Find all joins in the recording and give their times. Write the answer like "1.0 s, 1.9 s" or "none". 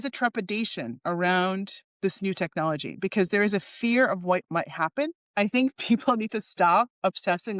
5.2 s